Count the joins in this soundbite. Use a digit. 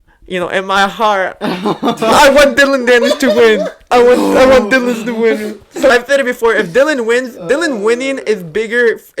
1